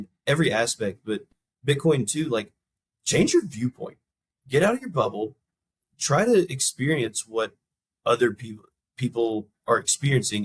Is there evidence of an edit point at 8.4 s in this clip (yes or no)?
no